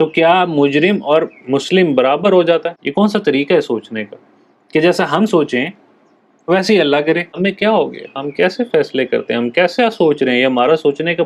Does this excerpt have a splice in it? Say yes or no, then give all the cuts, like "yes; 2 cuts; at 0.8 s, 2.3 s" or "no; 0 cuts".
yes; 2 cuts; at 2.7 s, 7.3 s